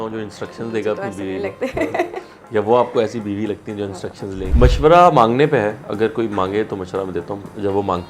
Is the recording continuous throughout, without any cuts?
no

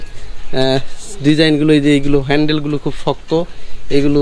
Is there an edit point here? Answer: no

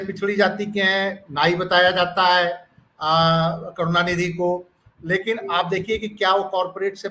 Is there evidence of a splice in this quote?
no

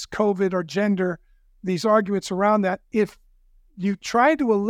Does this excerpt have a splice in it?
no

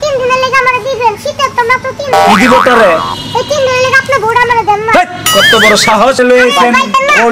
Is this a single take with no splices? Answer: no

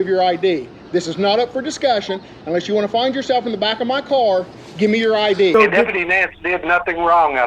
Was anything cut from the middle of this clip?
yes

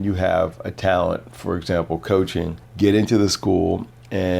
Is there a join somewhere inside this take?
yes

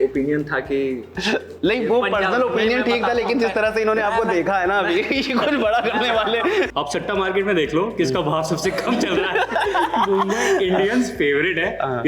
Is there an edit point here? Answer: yes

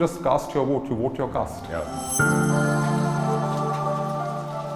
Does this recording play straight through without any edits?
no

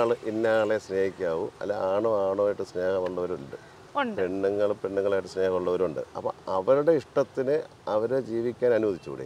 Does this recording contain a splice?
yes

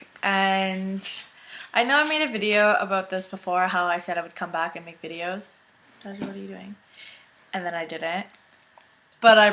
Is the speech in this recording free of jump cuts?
yes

